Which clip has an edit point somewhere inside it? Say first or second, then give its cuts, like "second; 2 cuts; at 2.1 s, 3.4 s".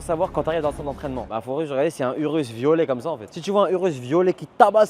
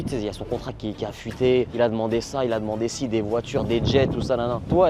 first; 2 cuts; at 0.8 s, 3.3 s